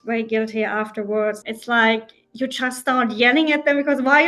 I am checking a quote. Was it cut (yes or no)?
yes